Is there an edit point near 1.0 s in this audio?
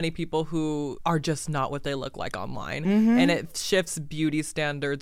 yes; 1 cut; at 1.0 s

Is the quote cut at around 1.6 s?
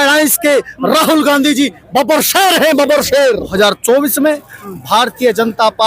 no; 1 cut; at 3.5 s

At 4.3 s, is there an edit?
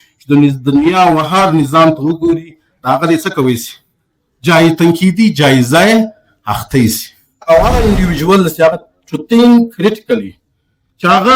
no; 1 cut; at 7.4 s

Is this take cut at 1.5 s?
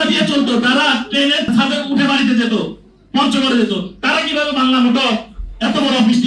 yes; 1 cut; at 1.5 s

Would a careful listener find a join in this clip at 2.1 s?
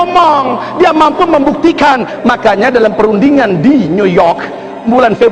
yes; 1 cut; at 2.1 s

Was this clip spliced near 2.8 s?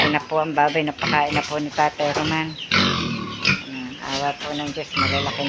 no; 0 cuts

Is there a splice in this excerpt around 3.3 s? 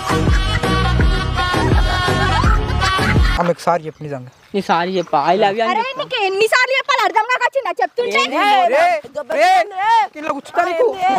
yes; 1 cut; at 3.3 s

